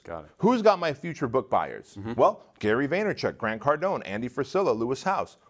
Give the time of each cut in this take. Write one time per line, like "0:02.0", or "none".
0:02.4

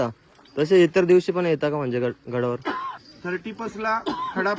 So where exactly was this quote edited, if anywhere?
0:03.0

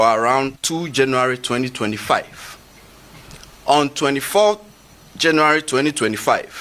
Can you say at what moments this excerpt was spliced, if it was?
none

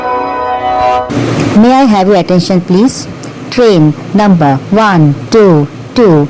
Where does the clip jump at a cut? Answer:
0:01.1

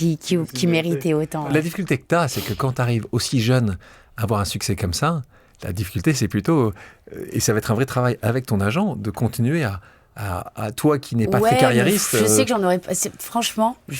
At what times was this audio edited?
none

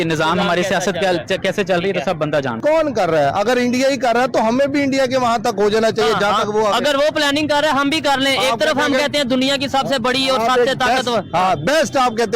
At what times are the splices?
0:02.6

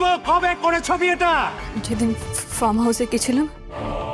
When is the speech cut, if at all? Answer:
0:01.7

